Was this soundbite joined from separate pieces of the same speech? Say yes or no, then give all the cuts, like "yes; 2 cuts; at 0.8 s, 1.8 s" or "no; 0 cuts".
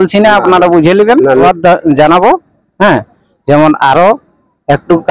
yes; 1 cut; at 1.4 s